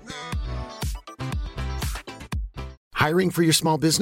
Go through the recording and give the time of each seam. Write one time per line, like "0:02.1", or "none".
0:02.7